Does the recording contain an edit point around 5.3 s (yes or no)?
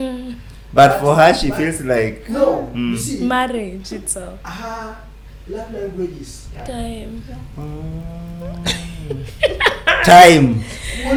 no